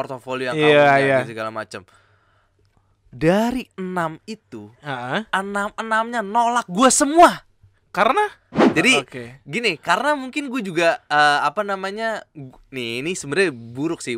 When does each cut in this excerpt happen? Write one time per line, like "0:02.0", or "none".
0:08.6